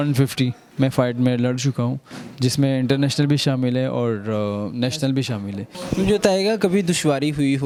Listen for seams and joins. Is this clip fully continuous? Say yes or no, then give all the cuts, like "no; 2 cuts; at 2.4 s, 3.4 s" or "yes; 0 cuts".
yes; 0 cuts